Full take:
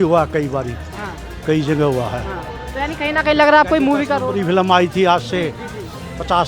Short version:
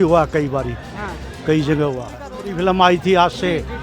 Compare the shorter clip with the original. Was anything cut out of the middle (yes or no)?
yes